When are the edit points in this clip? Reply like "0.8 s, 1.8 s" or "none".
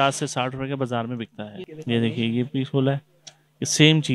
1.7 s